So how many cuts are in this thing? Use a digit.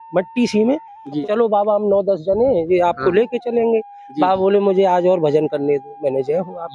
1